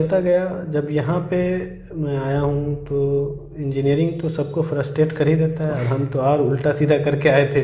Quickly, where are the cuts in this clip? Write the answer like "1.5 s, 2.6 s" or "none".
none